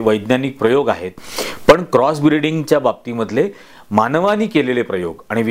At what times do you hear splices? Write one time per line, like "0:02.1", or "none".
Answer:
0:01.1